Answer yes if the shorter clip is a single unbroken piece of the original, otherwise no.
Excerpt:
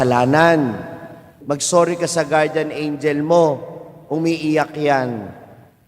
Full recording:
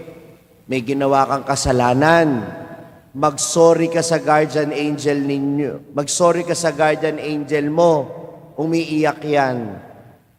no